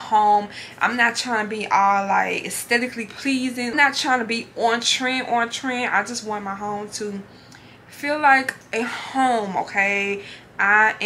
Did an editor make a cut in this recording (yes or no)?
yes